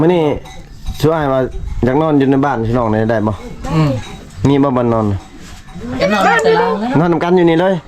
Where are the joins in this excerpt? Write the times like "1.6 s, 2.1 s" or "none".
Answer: none